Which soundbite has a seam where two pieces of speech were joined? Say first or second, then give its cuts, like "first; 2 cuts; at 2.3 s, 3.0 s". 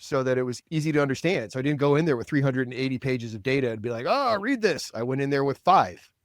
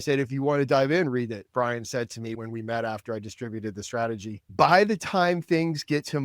second; 2 cuts; at 1.4 s, 4.5 s